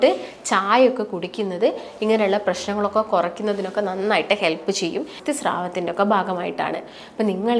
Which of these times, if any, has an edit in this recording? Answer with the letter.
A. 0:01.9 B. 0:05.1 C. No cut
B